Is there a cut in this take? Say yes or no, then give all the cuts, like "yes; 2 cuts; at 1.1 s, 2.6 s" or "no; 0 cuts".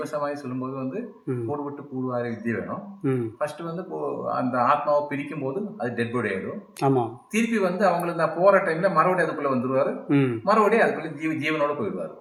no; 0 cuts